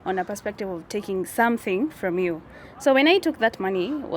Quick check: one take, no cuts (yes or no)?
yes